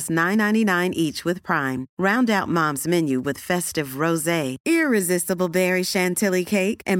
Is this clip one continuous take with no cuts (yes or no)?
yes